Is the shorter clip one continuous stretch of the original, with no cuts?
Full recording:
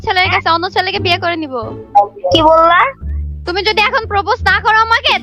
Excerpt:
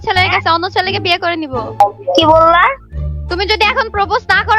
no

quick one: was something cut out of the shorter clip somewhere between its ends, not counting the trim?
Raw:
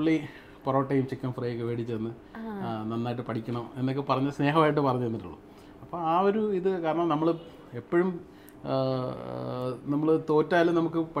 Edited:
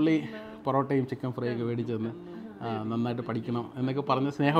no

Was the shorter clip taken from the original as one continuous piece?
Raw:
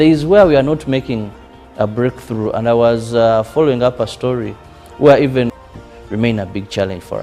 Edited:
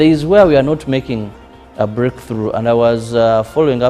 yes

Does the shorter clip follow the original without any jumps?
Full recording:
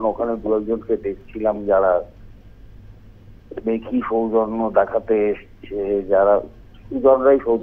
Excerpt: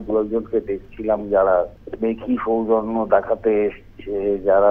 no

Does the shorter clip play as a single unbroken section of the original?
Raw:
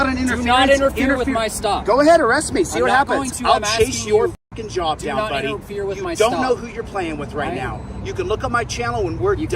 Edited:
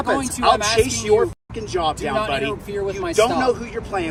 yes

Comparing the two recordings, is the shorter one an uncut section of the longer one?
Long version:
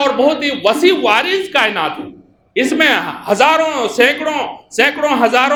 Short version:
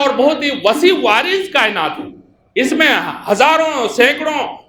yes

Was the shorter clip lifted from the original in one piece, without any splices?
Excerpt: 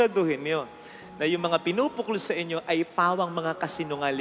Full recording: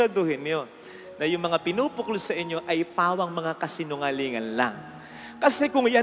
yes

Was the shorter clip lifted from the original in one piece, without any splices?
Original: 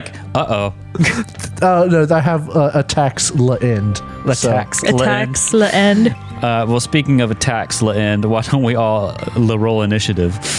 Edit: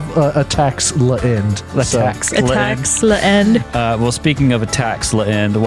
no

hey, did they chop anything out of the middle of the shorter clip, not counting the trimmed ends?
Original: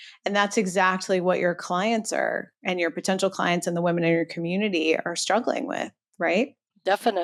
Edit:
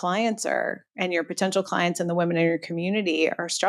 no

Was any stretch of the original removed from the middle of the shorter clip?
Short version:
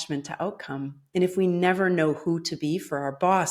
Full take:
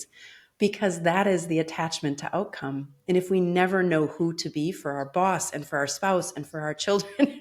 no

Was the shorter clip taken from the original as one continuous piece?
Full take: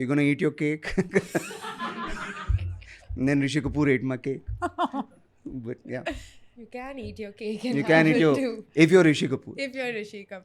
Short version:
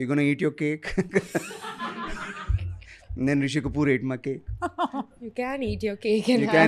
no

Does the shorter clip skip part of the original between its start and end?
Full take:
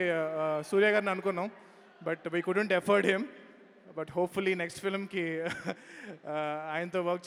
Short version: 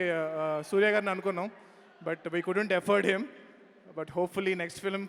no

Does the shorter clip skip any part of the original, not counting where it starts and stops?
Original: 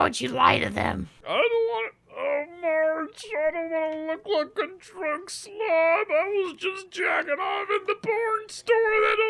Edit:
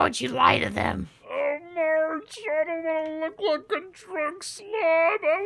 yes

